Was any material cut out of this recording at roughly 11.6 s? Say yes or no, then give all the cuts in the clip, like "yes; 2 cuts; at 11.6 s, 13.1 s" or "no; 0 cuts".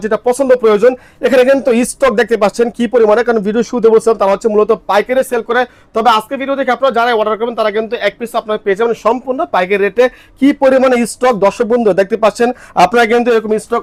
no; 0 cuts